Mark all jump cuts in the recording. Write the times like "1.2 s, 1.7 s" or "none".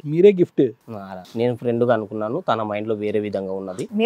1.1 s

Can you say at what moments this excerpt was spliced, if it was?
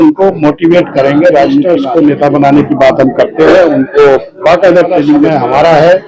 1.6 s, 5.2 s

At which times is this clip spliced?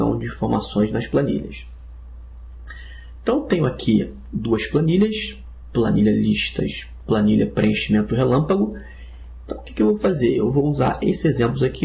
none

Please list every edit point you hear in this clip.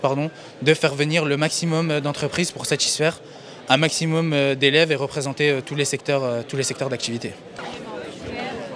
3.9 s

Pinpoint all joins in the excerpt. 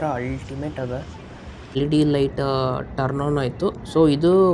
1.8 s

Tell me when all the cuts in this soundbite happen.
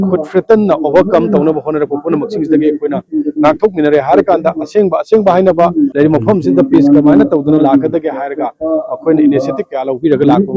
5.9 s

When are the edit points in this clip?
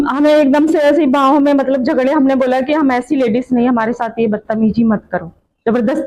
none

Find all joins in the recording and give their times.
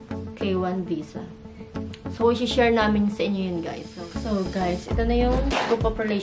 3.8 s

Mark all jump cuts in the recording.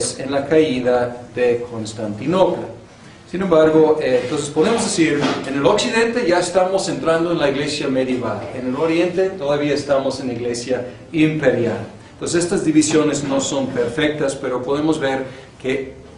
4.4 s

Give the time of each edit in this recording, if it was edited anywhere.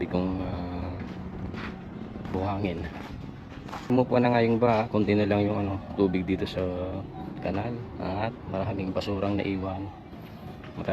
3.9 s

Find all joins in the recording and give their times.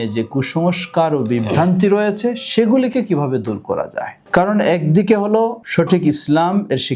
4.2 s, 5.6 s

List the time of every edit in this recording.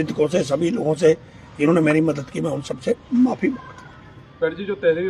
none

